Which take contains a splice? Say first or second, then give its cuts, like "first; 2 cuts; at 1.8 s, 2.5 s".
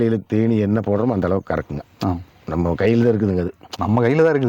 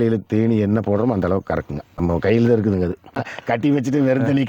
second; 2 cuts; at 1.8 s, 3.2 s